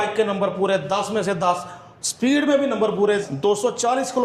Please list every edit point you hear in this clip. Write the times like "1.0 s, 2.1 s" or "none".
3.3 s